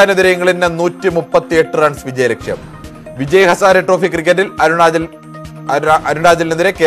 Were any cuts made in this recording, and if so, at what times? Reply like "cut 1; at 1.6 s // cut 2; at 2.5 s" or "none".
none